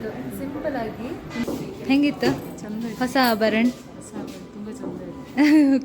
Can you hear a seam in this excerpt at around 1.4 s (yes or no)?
yes